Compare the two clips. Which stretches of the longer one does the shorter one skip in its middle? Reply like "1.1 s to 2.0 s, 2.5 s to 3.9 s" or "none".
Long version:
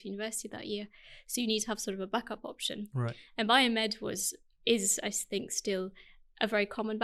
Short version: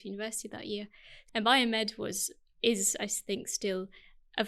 1.2 s to 3.2 s